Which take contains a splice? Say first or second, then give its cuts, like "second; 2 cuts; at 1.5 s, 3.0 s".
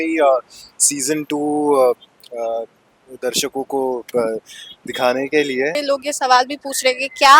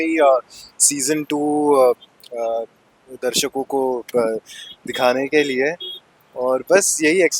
first; 1 cut; at 5.8 s